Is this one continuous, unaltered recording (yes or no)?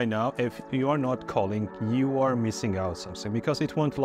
yes